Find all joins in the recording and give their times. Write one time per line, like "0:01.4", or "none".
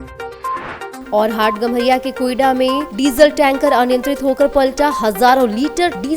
0:00.9